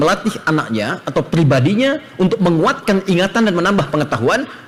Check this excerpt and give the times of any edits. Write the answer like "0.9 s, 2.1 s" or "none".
none